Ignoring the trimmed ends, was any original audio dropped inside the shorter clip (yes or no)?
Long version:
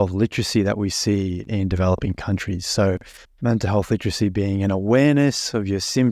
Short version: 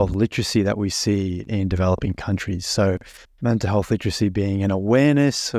no